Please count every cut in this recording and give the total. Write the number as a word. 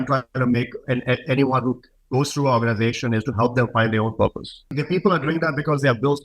one